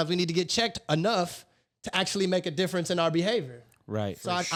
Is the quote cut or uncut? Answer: uncut